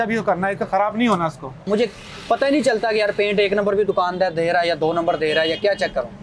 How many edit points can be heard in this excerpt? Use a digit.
1